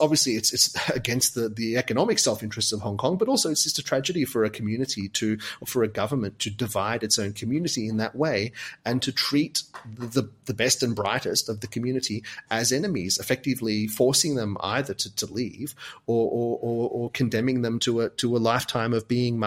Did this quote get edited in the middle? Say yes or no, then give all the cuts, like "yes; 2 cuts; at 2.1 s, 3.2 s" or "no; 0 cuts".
no; 0 cuts